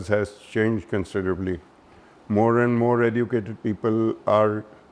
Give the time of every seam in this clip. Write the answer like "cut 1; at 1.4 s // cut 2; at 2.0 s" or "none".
none